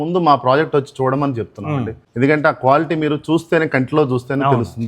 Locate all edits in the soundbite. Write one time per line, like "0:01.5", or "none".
0:02.0